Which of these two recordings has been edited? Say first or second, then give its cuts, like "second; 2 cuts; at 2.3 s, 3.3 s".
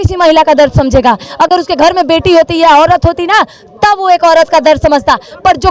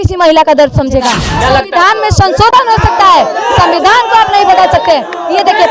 second; 1 cut; at 1.2 s